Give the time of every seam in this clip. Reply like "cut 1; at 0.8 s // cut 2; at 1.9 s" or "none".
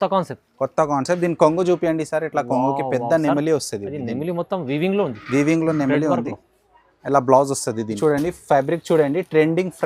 cut 1; at 8.0 s